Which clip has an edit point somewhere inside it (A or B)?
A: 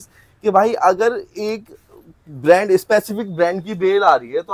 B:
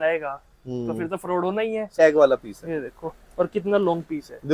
B